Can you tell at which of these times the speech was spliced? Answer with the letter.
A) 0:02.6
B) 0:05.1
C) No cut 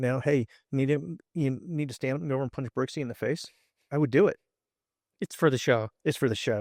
C